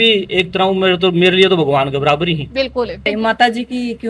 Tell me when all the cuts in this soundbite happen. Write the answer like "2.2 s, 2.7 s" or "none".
3.1 s